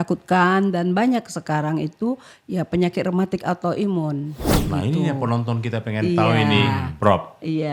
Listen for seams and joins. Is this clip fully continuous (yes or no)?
no